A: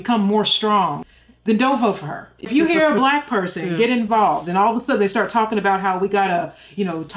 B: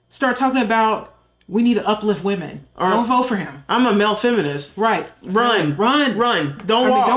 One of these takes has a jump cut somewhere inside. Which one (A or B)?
A